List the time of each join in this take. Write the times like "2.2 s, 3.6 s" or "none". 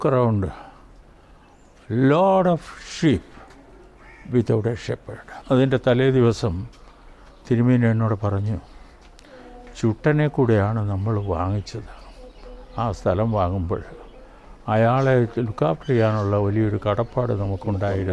5.4 s